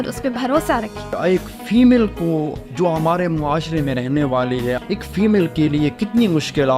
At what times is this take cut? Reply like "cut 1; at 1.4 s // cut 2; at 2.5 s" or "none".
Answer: cut 1; at 1.2 s // cut 2; at 4.8 s